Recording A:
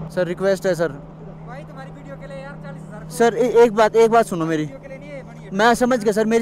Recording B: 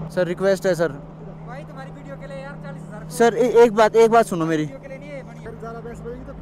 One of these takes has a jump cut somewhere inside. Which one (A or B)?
B